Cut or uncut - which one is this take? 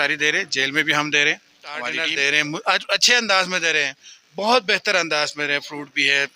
cut